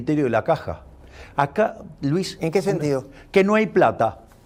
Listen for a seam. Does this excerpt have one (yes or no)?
no